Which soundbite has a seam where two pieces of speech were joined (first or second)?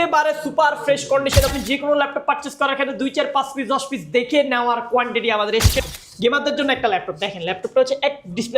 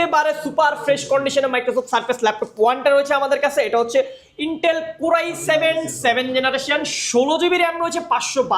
first